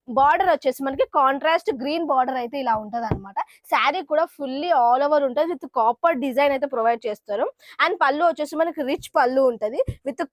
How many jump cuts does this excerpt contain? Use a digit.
0